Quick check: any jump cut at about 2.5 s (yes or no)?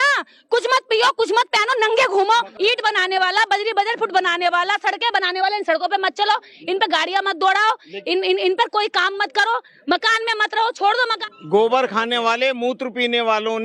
yes